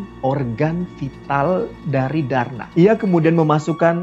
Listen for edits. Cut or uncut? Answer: cut